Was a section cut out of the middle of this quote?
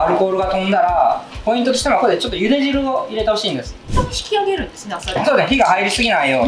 yes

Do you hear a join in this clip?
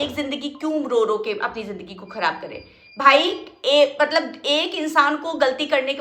no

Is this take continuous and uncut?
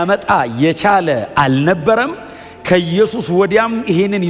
yes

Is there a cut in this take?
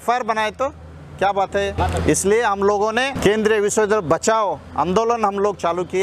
yes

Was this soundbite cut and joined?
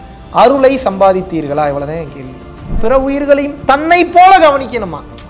yes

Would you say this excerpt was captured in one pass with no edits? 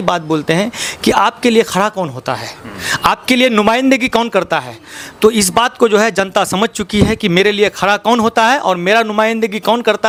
yes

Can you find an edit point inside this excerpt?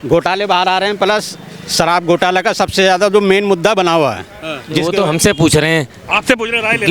yes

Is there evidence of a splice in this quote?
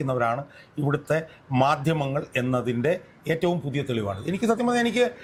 no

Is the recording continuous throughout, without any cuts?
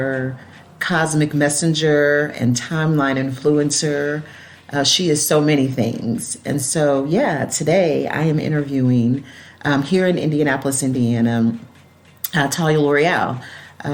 yes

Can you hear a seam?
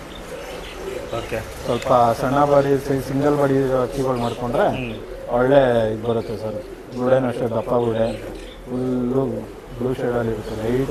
no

